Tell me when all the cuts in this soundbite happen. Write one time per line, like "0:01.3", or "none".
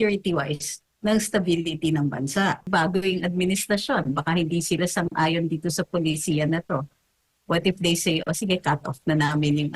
0:02.7